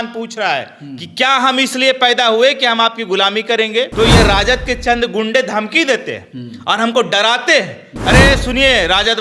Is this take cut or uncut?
cut